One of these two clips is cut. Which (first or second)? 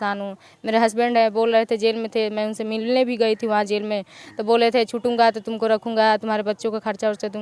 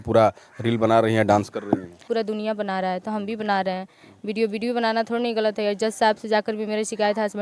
second